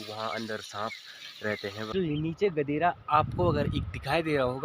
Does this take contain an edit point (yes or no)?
yes